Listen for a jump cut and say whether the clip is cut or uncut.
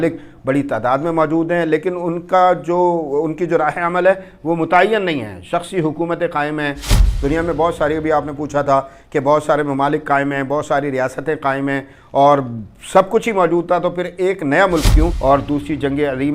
cut